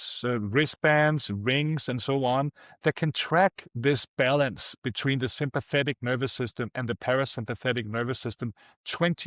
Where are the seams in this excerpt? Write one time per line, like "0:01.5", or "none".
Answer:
none